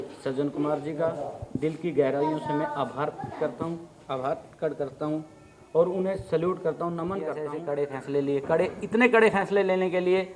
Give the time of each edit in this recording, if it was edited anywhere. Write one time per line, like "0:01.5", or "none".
0:07.5